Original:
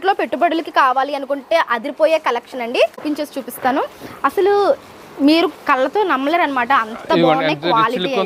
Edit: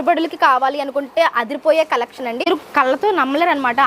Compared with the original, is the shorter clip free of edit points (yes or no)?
no